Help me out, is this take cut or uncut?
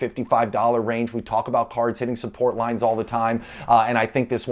uncut